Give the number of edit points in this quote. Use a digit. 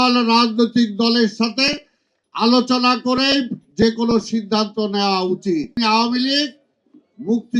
1